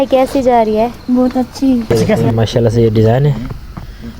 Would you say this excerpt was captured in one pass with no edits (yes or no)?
no